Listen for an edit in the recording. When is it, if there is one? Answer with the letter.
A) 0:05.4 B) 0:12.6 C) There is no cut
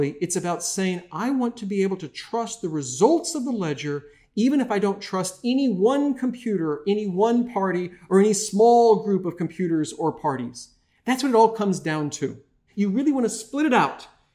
B